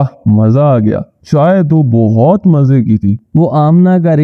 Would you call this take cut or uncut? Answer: uncut